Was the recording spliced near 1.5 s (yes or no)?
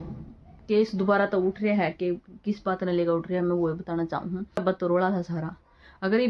no